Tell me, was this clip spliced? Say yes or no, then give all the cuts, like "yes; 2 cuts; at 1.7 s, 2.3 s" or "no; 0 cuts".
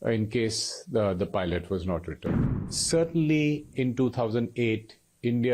yes; 1 cut; at 2.5 s